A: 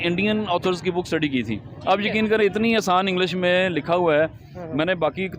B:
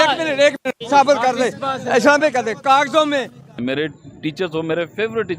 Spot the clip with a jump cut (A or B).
B